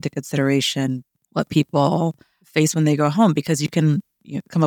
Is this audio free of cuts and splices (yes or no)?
no